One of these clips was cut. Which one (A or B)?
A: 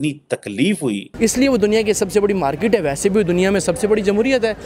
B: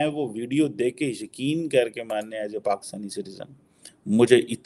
A